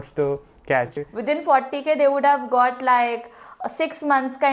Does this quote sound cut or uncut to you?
cut